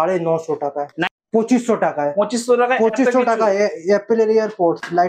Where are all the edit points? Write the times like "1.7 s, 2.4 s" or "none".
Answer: 1.0 s

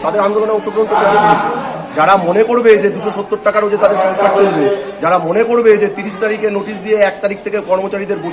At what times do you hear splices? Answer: none

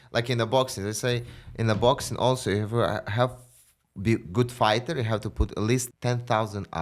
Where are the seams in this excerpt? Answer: 5.9 s

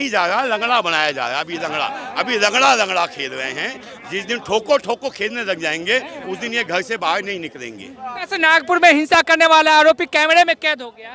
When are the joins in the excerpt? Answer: 8.2 s

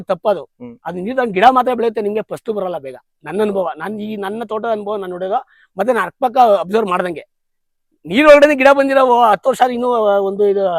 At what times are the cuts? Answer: none

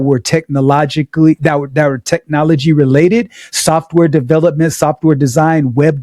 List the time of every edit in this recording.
none

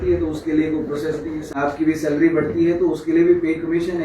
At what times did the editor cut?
1.5 s

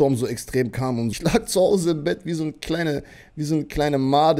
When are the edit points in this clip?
1.1 s

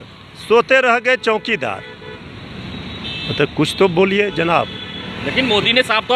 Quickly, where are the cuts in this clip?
none

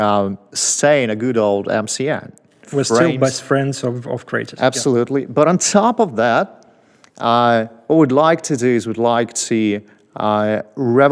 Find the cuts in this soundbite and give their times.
2.6 s

